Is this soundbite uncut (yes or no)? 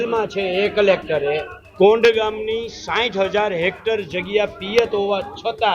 no